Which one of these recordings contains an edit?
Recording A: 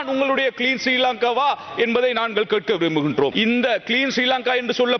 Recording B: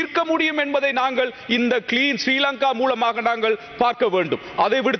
A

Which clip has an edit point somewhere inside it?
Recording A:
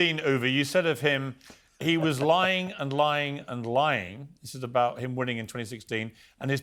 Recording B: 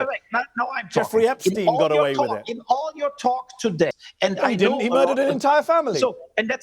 B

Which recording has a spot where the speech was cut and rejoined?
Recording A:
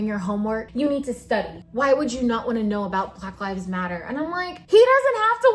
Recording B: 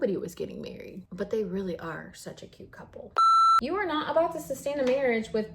B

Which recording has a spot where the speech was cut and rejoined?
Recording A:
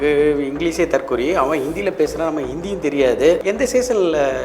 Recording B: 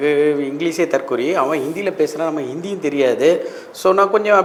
A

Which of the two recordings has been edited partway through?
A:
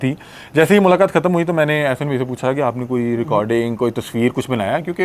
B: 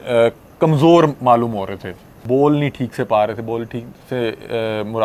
B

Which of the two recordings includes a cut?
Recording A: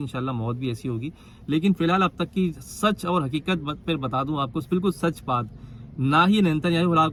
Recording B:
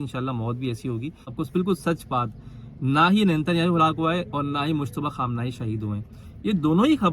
B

